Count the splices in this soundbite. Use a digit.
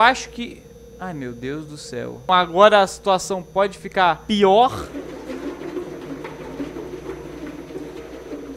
1